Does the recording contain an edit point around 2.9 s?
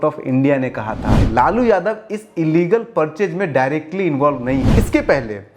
no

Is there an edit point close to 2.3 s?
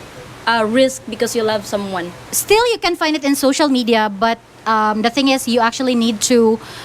yes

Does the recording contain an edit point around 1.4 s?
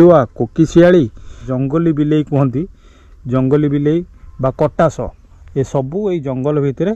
yes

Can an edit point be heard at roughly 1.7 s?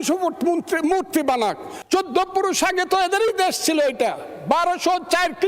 yes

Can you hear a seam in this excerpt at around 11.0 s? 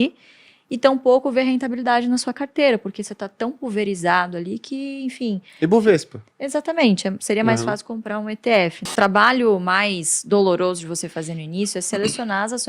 no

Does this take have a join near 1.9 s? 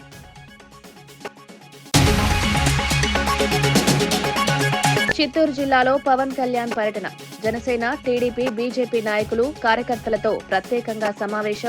yes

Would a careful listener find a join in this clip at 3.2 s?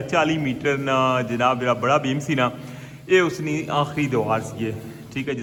no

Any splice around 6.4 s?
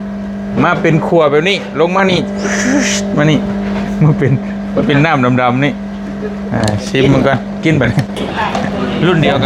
no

